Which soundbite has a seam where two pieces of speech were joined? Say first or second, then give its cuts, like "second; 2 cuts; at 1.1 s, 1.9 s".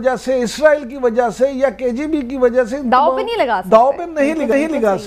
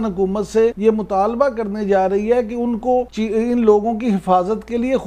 second; 2 cuts; at 0.8 s, 3.1 s